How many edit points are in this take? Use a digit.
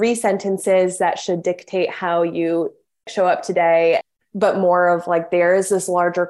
2